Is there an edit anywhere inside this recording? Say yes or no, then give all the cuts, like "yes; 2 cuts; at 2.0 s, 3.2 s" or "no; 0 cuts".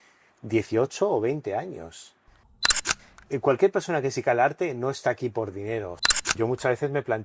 yes; 2 cuts; at 2.8 s, 6.4 s